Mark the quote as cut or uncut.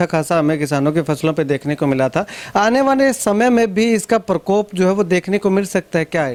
uncut